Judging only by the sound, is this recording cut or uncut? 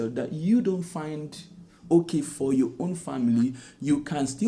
uncut